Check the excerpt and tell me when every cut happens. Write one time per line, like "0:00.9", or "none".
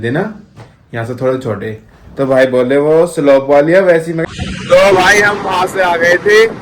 0:04.2